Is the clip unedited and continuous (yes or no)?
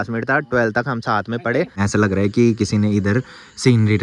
no